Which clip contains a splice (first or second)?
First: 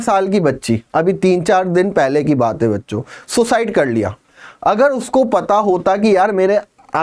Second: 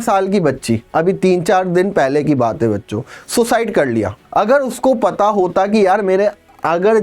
second